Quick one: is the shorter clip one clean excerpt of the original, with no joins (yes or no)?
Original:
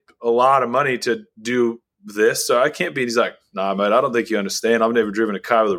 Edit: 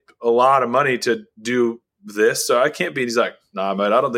yes